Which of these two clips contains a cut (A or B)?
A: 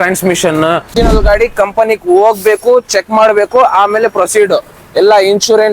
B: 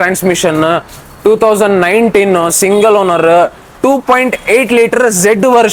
A